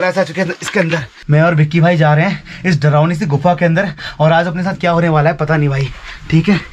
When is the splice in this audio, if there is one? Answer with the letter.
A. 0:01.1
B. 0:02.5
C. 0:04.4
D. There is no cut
A